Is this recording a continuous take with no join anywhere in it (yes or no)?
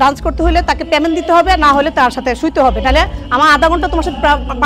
yes